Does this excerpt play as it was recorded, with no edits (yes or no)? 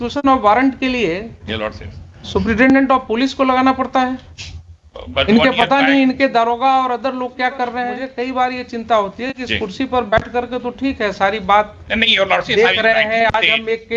no